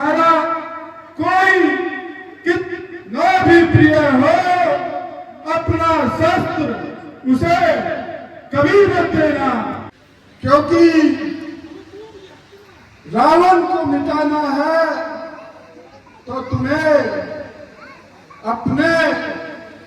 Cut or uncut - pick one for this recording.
cut